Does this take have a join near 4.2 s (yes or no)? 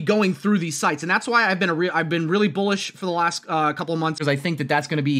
yes